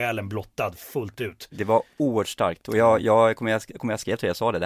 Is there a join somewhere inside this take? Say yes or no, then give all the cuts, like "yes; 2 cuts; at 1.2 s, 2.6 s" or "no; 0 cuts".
yes; 1 cut; at 1.5 s